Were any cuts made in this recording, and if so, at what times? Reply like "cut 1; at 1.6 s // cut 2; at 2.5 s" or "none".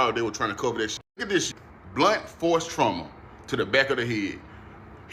cut 1; at 1.3 s